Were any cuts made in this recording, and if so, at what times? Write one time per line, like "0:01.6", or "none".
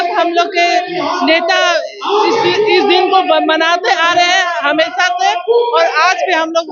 none

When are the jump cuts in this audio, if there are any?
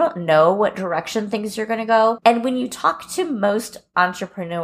0:02.2

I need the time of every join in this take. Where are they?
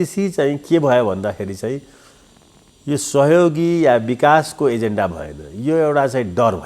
none

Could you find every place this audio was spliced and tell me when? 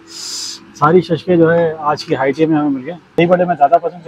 0:03.2

